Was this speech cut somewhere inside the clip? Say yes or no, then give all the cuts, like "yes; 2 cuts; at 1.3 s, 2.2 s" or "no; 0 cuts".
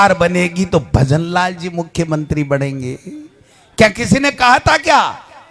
no; 0 cuts